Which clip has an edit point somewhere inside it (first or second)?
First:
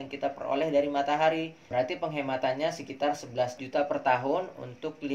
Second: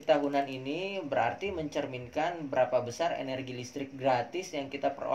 first